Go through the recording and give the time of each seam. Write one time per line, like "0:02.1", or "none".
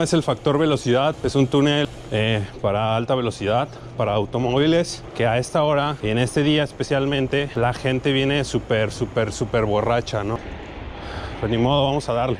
0:01.2
0:01.8
0:05.0
0:06.0
0:07.5
0:10.5